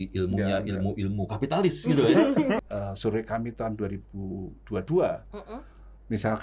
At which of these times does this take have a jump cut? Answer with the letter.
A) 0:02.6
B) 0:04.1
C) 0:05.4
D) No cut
A